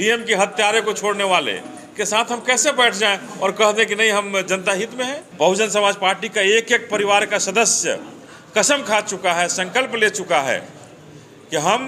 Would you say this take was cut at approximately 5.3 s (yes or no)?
yes